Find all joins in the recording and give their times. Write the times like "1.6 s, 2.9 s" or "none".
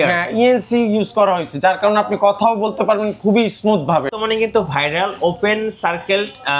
4.1 s